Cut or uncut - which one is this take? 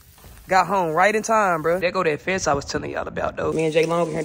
cut